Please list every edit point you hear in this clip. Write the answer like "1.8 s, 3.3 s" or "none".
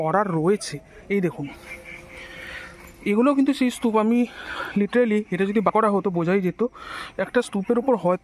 none